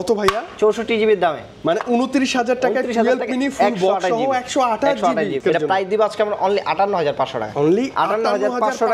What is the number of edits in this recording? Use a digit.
1